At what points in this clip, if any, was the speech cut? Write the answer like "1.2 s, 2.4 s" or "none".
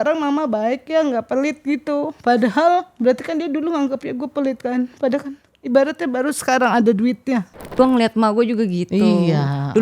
7.8 s